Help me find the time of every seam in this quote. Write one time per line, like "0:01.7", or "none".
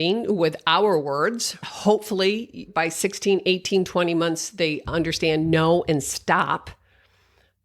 0:01.6
0:02.6